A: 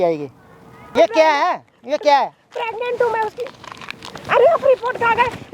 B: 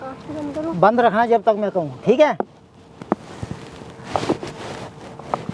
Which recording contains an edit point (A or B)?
A